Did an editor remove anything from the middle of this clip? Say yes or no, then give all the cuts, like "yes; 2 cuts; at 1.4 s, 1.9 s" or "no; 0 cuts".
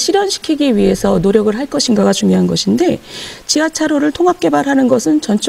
no; 0 cuts